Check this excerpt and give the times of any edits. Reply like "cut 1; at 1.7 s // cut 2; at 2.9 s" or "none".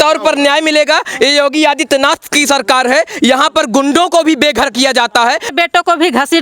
cut 1; at 5.5 s